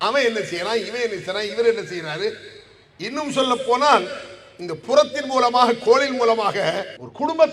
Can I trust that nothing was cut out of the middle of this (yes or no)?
yes